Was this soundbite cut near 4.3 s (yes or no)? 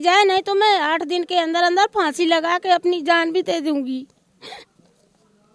no